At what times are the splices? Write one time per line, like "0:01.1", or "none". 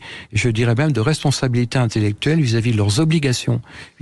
none